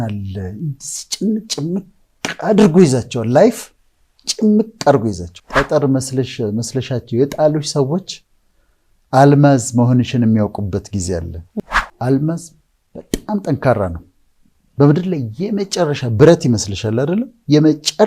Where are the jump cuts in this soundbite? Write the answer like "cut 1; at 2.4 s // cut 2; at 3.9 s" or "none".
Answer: cut 1; at 5.3 s // cut 2; at 11.4 s